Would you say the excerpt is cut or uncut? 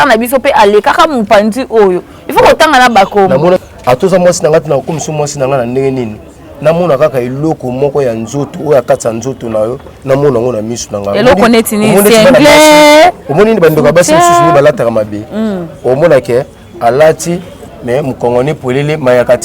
cut